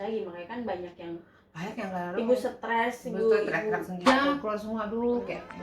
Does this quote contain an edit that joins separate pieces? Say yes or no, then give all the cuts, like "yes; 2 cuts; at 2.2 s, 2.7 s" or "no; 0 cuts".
yes; 1 cut; at 4.1 s